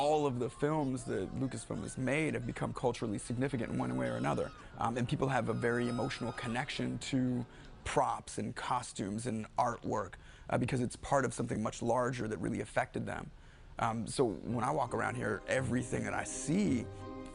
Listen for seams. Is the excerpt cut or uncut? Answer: cut